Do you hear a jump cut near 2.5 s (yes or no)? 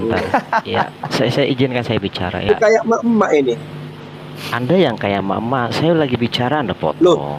yes